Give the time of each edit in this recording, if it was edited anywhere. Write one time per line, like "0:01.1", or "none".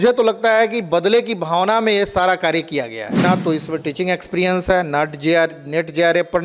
0:03.2